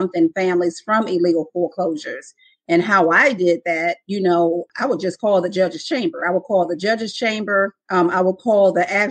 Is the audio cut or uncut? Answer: cut